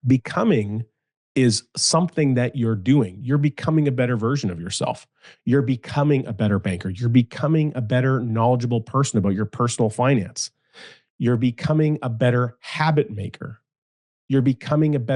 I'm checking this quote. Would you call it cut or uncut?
uncut